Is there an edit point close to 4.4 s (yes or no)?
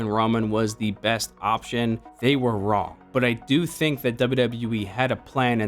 no